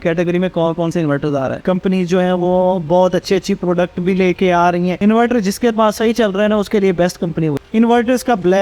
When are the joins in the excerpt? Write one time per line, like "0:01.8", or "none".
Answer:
0:01.5
0:05.0
0:07.6